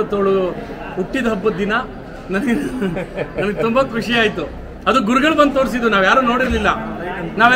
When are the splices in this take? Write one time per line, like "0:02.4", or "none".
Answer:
none